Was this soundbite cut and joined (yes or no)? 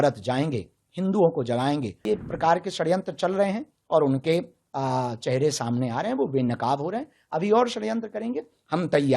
yes